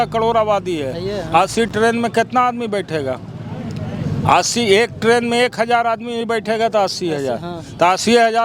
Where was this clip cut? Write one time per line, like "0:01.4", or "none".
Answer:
none